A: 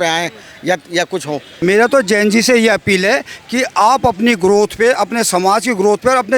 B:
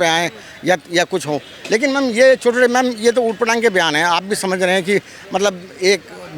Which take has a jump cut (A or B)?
A